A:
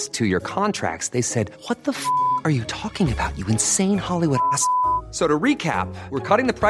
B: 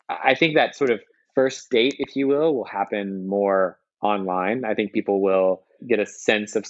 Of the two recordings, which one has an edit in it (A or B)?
B